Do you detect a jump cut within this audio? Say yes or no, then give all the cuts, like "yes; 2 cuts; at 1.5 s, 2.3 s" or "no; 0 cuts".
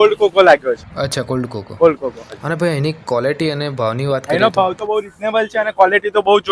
no; 0 cuts